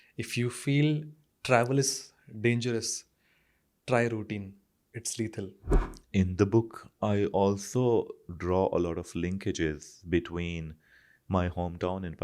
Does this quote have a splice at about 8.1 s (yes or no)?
no